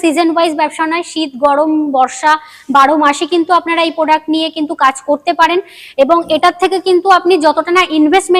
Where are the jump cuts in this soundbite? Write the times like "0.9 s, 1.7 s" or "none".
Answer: none

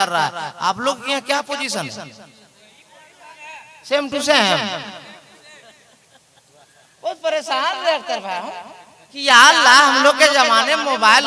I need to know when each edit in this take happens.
none

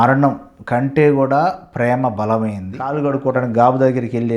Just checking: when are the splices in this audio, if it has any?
3.0 s

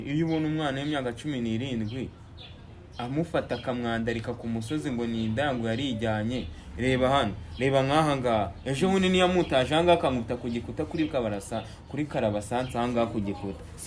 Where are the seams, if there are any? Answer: none

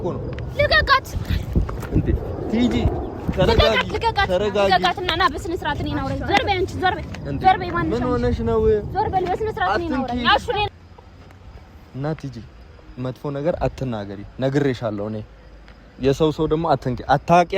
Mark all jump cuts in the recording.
none

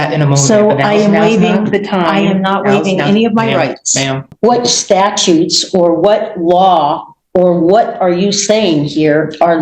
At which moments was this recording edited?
4.2 s

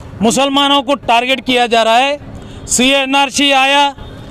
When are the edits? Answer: none

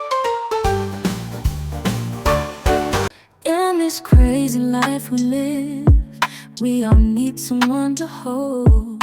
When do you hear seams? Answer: 3.2 s

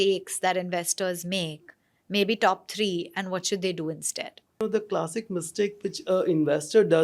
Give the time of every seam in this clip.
4.6 s

